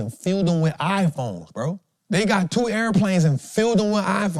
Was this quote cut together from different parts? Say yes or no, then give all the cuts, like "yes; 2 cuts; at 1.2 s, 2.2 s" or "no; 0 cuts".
yes; 1 cut; at 1.9 s